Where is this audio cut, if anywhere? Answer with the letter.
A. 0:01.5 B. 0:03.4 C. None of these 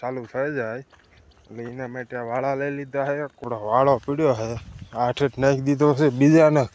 B